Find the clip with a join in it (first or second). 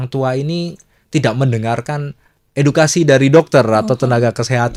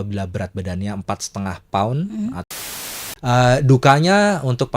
second